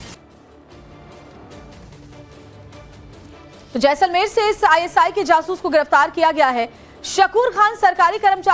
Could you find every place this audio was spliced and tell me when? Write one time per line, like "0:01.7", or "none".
0:07.4